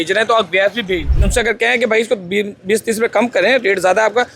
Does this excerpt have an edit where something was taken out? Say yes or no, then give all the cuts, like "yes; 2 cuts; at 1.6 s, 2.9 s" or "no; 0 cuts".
yes; 1 cut; at 1.1 s